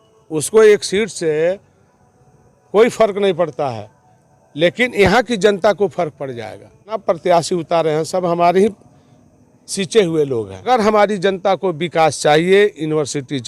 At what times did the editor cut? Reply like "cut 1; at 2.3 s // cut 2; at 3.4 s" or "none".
cut 1; at 7.0 s // cut 2; at 10.6 s